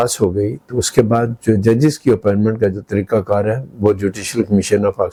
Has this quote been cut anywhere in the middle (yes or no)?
no